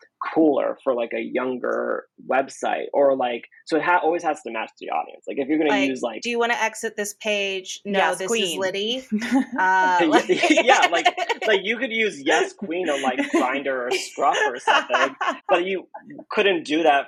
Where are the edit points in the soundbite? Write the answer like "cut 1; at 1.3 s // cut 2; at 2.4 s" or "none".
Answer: none

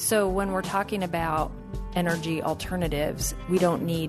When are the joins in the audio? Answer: none

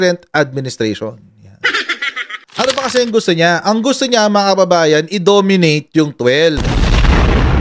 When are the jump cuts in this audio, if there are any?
none

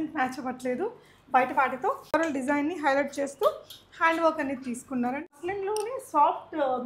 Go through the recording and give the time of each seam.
cut 1; at 2.1 s // cut 2; at 5.4 s

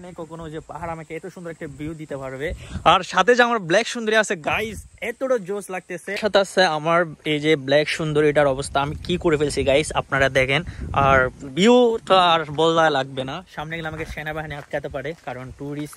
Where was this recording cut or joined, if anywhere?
cut 1; at 6.1 s

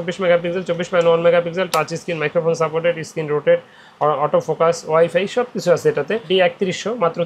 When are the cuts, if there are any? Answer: cut 1; at 6.3 s

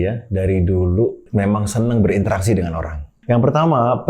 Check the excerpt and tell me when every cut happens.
cut 1; at 1.2 s // cut 2; at 3.1 s

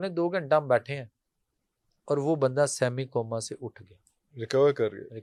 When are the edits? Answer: none

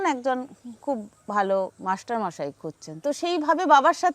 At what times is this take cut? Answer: cut 1; at 2.8 s

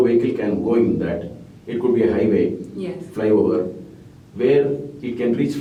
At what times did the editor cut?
none

